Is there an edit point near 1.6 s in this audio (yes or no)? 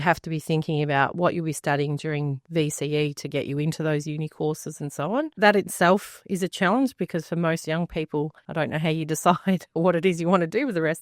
no